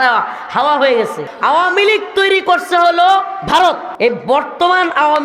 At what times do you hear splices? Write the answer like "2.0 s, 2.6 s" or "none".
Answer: 1.2 s, 3.9 s